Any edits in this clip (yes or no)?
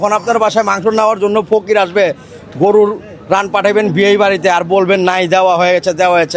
no